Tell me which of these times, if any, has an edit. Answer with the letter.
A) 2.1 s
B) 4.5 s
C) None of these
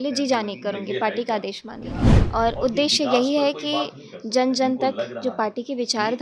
A